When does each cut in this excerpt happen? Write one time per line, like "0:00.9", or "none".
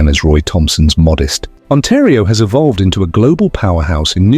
0:01.5